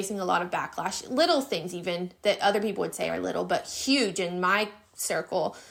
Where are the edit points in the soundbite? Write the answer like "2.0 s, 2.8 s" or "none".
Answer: none